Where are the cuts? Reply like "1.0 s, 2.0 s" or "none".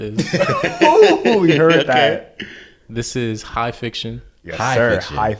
none